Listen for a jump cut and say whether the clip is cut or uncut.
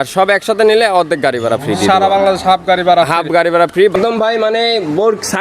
cut